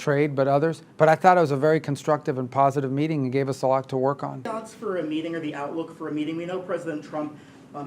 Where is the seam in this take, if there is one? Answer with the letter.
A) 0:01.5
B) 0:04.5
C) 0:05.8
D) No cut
B